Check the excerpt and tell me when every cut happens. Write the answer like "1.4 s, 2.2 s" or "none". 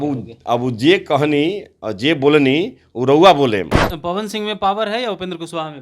3.8 s